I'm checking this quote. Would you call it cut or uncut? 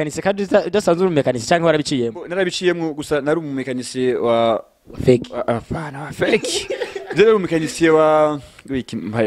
uncut